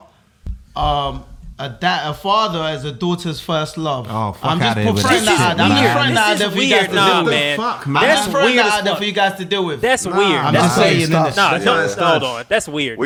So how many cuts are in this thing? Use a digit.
0